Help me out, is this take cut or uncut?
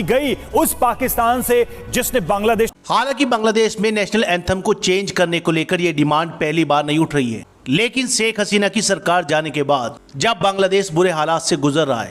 cut